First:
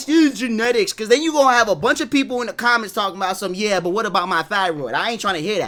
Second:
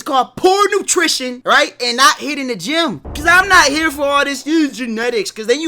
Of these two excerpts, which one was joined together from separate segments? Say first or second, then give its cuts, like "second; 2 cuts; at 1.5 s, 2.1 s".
second; 2 cuts; at 1.4 s, 3.1 s